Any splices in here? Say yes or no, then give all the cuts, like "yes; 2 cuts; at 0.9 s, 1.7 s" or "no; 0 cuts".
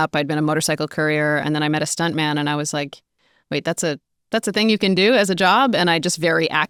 no; 0 cuts